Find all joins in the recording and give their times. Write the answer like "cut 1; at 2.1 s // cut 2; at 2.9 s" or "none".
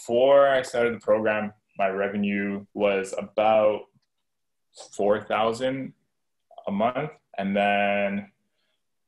cut 1; at 2.6 s